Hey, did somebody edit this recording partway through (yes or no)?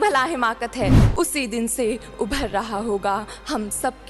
yes